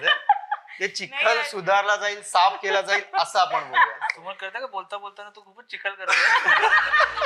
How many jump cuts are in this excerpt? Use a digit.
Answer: 0